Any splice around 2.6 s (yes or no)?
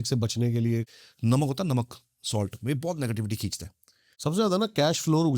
no